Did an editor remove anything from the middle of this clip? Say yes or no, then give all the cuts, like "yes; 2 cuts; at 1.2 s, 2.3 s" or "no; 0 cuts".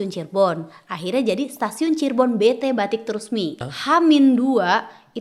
yes; 1 cut; at 3.6 s